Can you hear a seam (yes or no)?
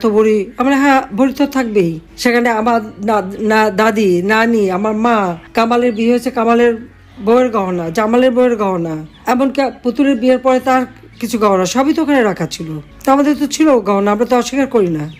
no